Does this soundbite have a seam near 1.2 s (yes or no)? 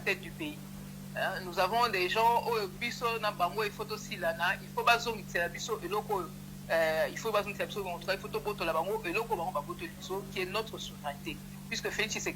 no